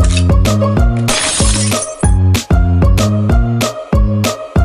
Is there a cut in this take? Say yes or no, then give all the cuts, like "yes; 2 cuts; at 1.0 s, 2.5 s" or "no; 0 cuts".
no; 0 cuts